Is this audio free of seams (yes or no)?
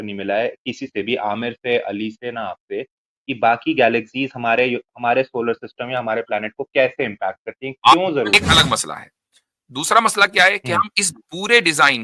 no